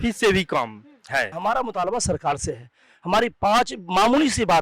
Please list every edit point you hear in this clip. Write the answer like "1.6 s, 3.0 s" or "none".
1.3 s

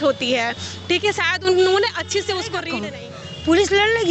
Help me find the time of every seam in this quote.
2.6 s

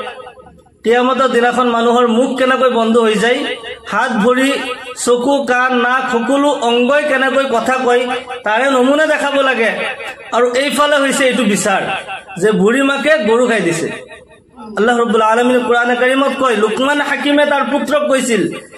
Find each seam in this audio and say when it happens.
14.6 s

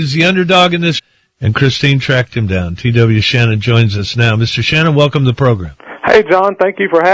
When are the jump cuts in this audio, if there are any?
none

